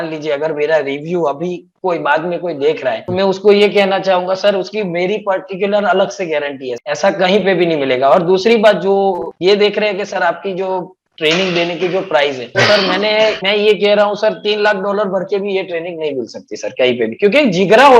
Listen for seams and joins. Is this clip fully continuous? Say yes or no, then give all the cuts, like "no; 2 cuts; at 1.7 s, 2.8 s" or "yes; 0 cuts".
yes; 0 cuts